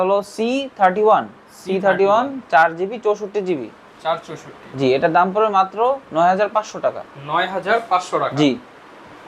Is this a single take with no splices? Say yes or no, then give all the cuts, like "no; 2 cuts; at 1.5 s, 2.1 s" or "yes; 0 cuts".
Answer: yes; 0 cuts